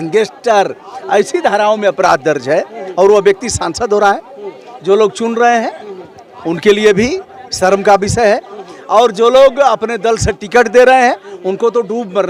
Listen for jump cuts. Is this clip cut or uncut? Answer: uncut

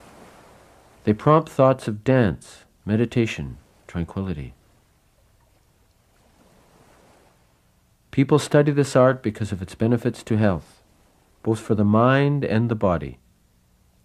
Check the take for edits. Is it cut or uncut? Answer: uncut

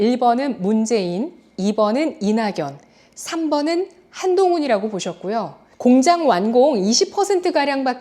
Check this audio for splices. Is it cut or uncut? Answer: cut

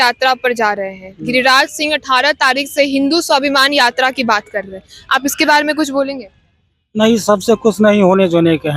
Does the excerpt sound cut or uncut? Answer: uncut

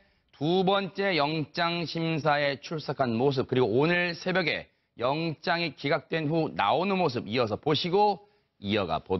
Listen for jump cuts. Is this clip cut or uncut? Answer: uncut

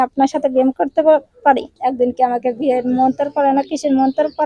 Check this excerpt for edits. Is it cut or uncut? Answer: cut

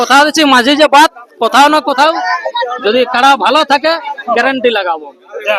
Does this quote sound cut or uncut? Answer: uncut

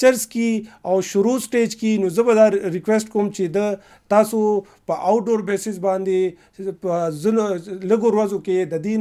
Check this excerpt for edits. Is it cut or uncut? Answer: uncut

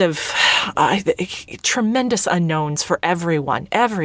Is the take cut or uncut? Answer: uncut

